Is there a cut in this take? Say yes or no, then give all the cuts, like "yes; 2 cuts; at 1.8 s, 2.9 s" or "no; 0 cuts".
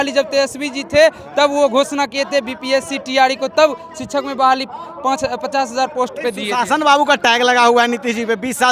no; 0 cuts